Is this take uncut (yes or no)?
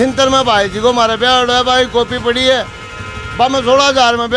yes